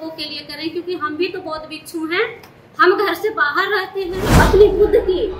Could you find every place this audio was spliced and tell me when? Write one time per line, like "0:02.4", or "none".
0:04.3